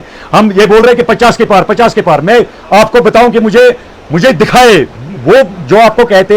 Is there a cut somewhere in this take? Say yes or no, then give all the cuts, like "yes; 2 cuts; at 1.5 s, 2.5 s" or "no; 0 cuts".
no; 0 cuts